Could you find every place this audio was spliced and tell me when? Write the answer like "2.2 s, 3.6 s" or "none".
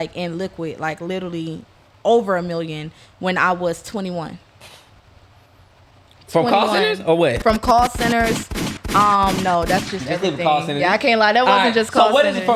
none